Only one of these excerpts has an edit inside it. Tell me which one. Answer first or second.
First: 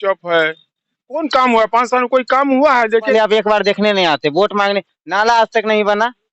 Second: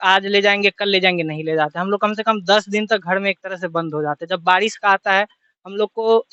first